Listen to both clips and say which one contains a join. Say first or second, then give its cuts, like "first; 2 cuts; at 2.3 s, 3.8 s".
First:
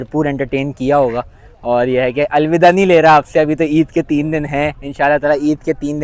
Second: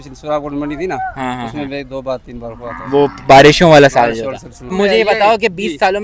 second; 1 cut; at 4.7 s